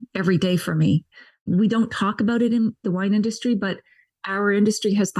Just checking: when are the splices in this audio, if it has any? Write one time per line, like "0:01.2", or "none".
0:01.3
0:02.8